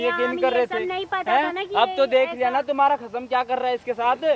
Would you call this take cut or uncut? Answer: uncut